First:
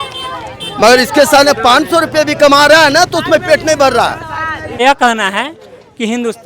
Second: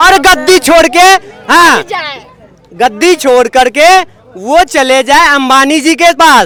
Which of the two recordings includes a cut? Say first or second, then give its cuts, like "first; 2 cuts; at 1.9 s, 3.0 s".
first; 1 cut; at 4.8 s